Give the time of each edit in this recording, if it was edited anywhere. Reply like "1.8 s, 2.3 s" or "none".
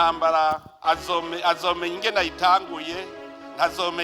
2.2 s